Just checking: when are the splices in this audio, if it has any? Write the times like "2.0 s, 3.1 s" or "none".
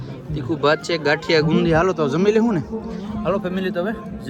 none